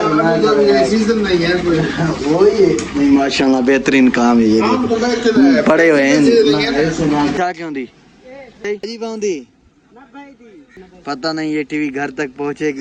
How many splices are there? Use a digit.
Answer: 3